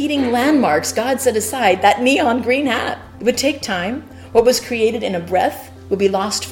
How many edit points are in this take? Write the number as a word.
two